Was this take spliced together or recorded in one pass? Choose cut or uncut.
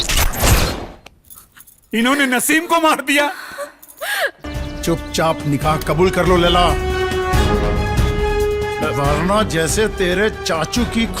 cut